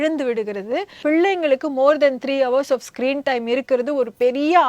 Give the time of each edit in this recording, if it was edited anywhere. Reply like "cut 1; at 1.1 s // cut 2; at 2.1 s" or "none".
cut 1; at 0.9 s

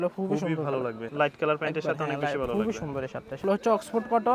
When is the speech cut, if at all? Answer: cut 1; at 1.1 s // cut 2; at 3.3 s

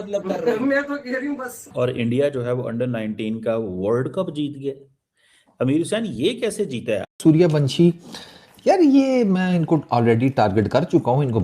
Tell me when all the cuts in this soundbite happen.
cut 1; at 1.8 s // cut 2; at 7.0 s

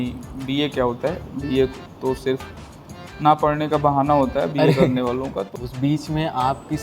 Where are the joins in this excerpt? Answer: cut 1; at 5.4 s

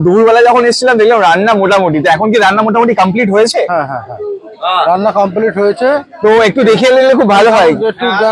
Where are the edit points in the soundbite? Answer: none

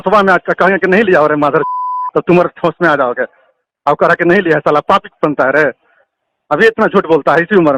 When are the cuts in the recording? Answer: none

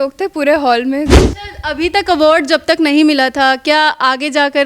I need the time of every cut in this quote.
cut 1; at 1.3 s

